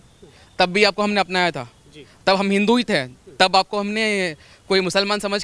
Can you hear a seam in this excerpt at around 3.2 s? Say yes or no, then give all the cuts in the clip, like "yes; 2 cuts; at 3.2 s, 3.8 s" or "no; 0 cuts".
no; 0 cuts